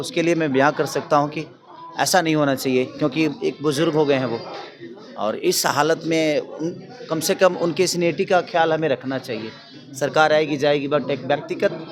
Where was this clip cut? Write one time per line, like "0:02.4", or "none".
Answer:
none